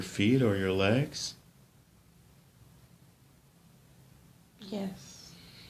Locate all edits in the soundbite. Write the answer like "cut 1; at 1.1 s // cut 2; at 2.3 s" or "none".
cut 1; at 2.7 s